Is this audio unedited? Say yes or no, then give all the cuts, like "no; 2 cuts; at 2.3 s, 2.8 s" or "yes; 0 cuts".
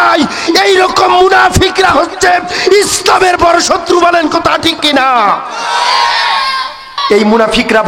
no; 1 cut; at 7.0 s